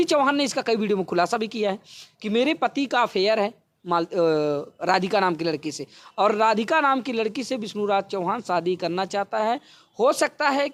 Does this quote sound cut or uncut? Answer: uncut